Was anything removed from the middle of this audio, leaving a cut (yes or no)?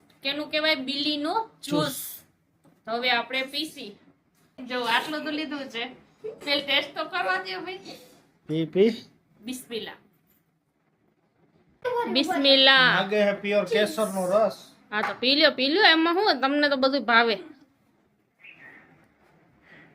yes